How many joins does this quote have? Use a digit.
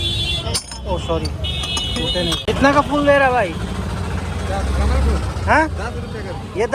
1